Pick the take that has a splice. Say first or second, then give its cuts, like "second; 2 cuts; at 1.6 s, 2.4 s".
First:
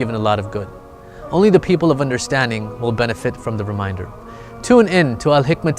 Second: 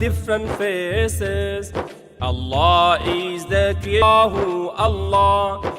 second; 2 cuts; at 2.0 s, 4.0 s